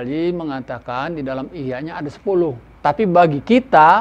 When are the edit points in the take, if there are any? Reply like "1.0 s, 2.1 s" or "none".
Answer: 2.7 s